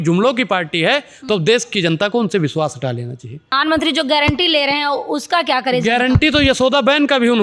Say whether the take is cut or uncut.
cut